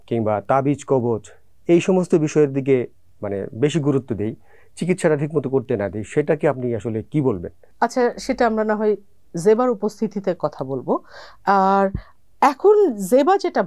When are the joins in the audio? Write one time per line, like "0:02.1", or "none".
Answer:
none